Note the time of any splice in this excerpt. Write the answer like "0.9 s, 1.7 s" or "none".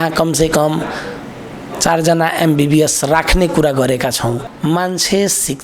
4.4 s